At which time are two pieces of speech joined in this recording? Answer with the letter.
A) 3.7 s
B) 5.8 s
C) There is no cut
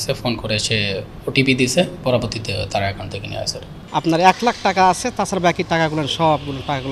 A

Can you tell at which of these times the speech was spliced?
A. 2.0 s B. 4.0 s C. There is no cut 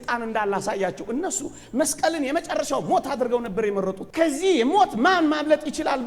B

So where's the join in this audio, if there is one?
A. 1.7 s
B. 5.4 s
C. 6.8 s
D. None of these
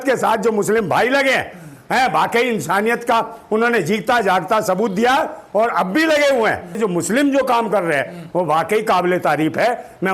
C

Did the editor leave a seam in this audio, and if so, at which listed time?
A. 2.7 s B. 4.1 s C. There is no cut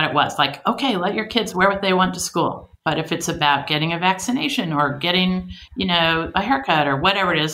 A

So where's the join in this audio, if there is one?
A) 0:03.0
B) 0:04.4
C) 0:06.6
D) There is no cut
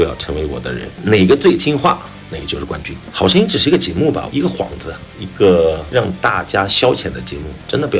A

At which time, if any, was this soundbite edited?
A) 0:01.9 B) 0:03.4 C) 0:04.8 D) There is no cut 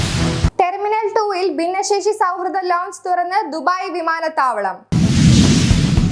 C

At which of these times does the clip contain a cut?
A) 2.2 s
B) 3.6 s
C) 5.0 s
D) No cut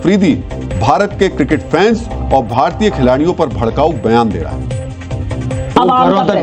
D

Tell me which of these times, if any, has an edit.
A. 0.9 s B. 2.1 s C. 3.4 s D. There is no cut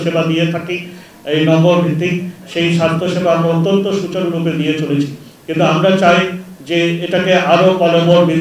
D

